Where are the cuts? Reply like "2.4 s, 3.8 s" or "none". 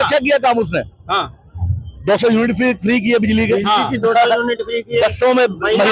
none